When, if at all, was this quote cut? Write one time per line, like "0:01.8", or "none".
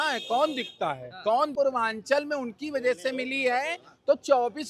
0:01.5